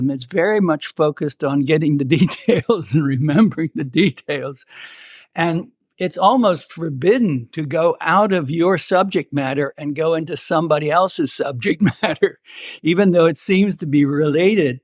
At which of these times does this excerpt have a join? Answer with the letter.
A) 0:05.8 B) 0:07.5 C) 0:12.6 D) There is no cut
B